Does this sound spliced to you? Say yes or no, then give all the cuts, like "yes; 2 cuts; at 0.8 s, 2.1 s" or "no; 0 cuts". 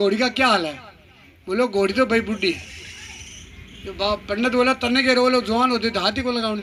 no; 0 cuts